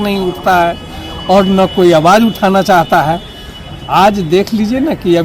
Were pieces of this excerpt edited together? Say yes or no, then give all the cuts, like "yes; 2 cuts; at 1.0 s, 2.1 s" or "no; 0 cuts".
no; 0 cuts